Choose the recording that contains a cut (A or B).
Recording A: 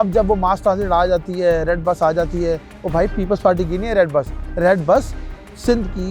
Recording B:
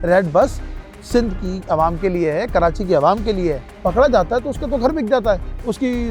B